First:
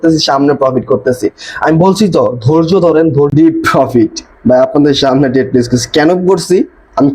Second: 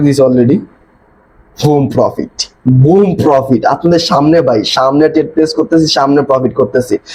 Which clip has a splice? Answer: first; 1 cut; at 3.3 s

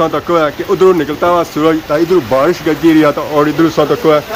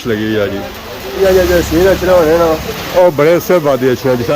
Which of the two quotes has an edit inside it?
second; 2 cuts; at 1.2 s, 2.8 s

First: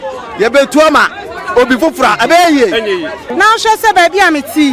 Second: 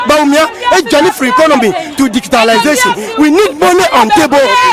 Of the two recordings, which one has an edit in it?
first; 1 cut; at 3.2 s

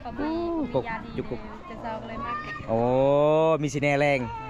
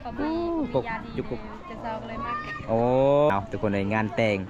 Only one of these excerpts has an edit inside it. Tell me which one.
second; 1 cut; at 3.3 s

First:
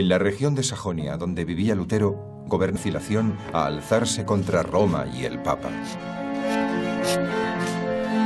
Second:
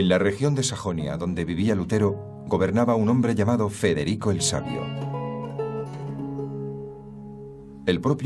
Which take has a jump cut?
second; 1 cut; at 2.7 s

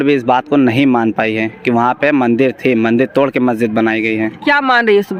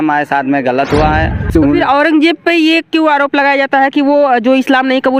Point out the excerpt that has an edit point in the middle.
second; 1 cut; at 1.5 s

